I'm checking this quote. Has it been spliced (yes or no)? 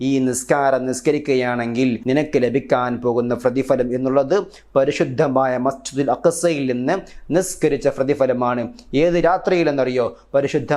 yes